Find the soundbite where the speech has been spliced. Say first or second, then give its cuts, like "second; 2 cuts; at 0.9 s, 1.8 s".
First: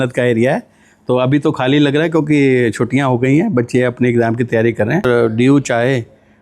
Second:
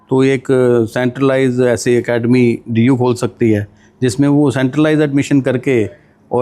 first; 1 cut; at 5.1 s